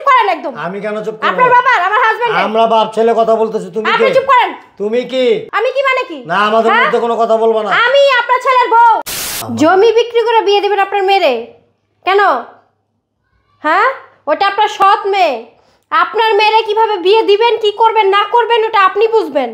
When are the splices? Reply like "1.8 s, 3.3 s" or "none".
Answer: 9.1 s